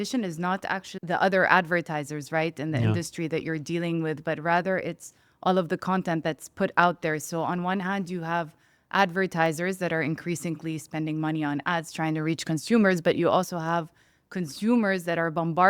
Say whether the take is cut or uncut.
cut